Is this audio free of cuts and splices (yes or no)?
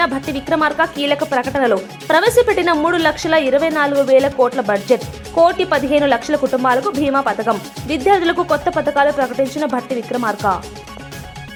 yes